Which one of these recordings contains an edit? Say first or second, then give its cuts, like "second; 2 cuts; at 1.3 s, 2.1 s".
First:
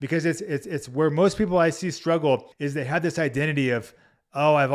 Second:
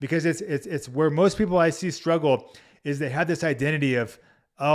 first; 1 cut; at 2.6 s